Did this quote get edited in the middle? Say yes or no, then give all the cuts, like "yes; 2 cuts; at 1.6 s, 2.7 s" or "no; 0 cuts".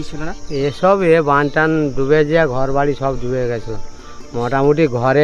no; 0 cuts